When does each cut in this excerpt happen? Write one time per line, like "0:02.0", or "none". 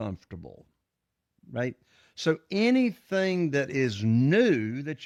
none